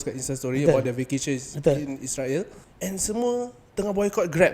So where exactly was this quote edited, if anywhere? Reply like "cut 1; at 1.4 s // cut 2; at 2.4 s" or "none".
cut 1; at 2.5 s